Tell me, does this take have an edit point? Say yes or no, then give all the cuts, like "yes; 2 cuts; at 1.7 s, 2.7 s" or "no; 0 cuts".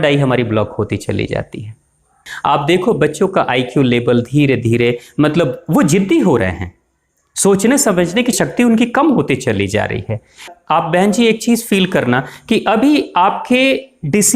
yes; 3 cuts; at 2.3 s, 8.4 s, 10.5 s